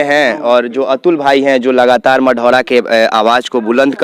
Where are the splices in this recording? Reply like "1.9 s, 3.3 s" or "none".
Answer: none